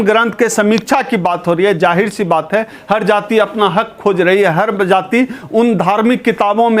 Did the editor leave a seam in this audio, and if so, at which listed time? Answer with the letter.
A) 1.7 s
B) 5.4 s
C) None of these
C